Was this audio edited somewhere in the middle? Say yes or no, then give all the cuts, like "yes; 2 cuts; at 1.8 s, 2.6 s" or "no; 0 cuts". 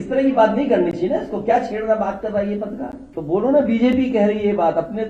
yes; 1 cut; at 3.0 s